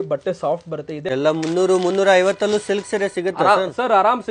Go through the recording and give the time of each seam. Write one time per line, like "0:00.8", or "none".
0:01.1